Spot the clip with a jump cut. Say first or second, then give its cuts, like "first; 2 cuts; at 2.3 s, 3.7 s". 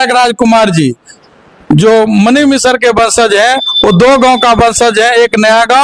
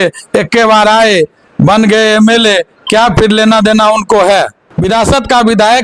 second; 1 cut; at 4.7 s